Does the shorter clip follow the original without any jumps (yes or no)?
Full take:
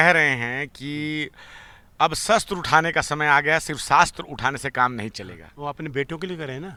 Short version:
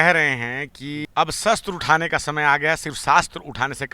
no